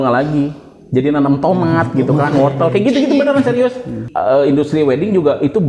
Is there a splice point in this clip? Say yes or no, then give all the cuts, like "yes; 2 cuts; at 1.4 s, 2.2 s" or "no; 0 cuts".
yes; 1 cut; at 4.0 s